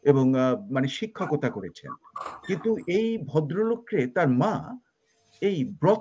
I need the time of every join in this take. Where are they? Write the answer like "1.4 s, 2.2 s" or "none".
none